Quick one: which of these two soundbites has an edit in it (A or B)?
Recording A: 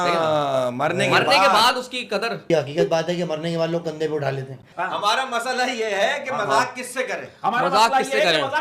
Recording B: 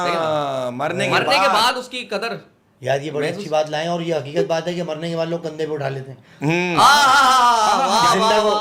A